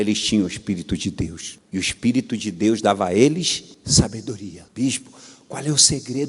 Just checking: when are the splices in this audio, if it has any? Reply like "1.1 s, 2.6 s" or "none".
4.6 s